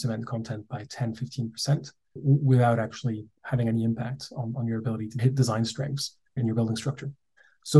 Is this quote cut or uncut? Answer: cut